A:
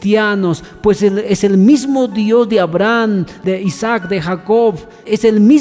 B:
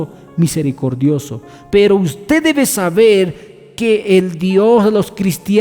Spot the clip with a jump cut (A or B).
B